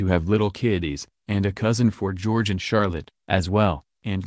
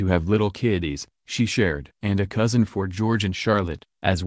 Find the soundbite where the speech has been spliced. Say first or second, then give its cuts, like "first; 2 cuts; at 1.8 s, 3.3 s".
second; 2 cuts; at 1.1 s, 1.9 s